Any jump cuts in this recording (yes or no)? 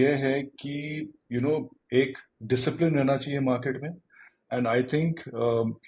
no